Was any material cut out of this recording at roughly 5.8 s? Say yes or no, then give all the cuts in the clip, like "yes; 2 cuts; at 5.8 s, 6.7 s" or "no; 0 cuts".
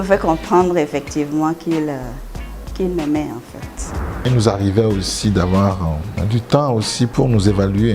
no; 1 cut; at 4.0 s